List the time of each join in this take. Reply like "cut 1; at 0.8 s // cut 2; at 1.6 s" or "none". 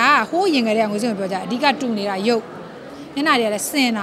none